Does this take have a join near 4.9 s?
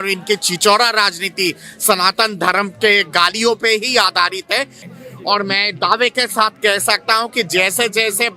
yes; 1 cut; at 4.9 s

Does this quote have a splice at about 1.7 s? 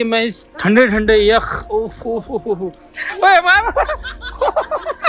no; 1 cut; at 3.0 s

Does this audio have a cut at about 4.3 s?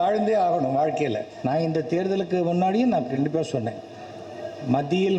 no; 1 cut; at 1.3 s

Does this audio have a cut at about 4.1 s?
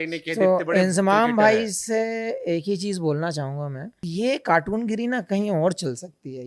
yes; 1 cut; at 4.1 s

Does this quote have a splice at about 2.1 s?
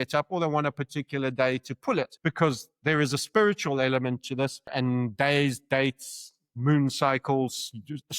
yes; 2 cuts; at 2.1 s, 4.7 s

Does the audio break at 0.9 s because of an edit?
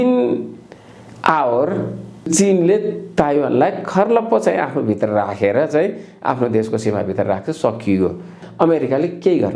no; 2 cuts; at 2.3 s, 8.4 s

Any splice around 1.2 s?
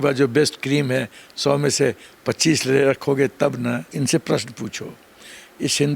no; 1 cut; at 3.9 s

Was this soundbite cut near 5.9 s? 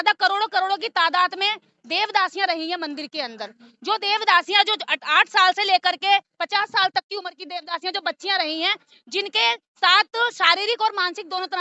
no; 0 cuts

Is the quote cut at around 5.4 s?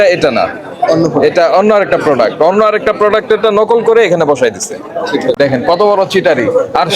yes; 1 cut; at 5.4 s

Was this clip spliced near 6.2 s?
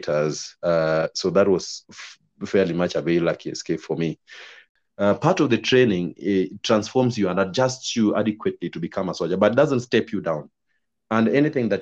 no; 1 cut; at 4.7 s

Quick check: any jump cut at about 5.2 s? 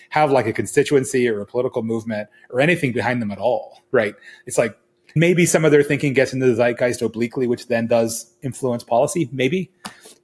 yes; 1 cut; at 5.2 s

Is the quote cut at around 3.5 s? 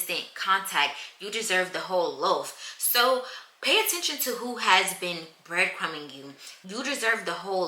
no; 1 cut; at 6.4 s

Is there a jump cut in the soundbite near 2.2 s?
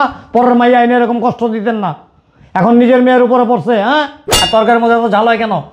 no; 1 cut; at 4.3 s

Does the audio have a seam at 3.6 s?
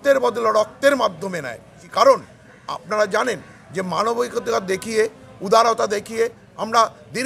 no; 1 cut; at 1.8 s

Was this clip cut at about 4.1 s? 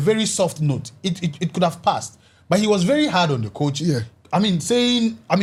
no; 0 cuts

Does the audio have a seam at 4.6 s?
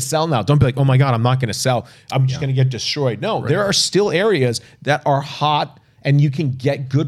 no; 0 cuts

